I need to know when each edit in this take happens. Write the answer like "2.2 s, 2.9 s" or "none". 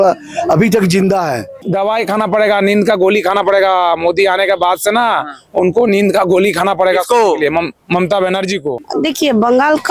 1.6 s, 8.8 s